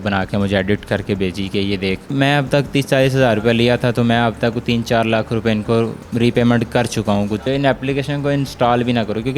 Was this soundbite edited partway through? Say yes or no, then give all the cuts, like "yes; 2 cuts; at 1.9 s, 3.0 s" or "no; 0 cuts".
yes; 3 cuts; at 2.1 s, 6.0 s, 7.4 s